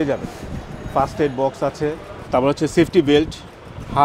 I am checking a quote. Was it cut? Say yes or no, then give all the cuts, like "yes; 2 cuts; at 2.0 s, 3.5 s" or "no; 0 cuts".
yes; 1 cut; at 2.1 s